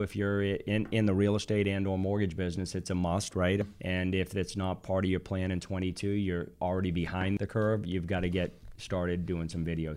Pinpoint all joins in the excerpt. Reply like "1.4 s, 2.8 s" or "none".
3.6 s, 7.4 s